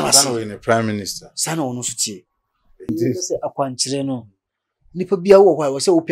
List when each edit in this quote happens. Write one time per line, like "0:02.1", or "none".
0:02.9